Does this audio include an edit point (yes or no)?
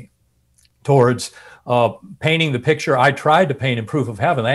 no